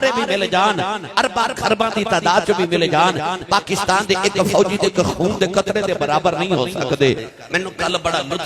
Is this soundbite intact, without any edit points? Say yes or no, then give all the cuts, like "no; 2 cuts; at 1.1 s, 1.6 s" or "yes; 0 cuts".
no; 1 cut; at 7.2 s